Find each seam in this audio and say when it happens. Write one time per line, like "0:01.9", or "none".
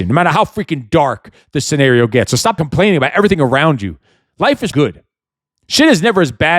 0:02.6
0:04.7